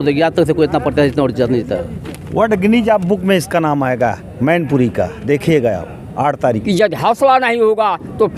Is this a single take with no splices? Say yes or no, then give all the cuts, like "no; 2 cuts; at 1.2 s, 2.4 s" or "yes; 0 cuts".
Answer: no; 1 cut; at 6.6 s